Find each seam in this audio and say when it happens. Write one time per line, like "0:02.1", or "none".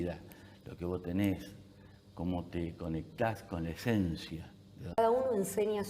0:05.0